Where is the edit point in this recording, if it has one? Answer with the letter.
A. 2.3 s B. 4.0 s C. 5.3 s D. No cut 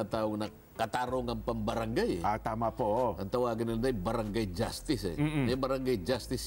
D